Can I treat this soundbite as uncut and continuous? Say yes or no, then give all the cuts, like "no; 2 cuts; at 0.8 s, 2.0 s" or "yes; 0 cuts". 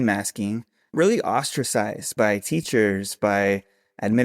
no; 2 cuts; at 0.9 s, 2.1 s